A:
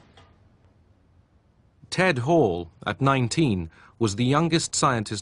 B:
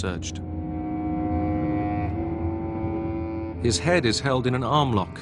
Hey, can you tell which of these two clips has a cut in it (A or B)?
A